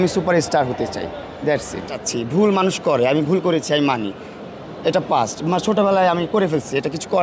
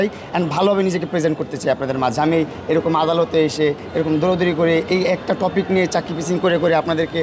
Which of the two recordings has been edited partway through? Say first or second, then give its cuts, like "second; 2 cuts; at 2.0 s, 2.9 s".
first; 1 cut; at 1.9 s